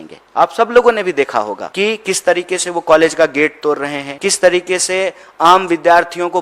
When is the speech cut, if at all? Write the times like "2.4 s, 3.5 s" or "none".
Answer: 1.6 s, 4.0 s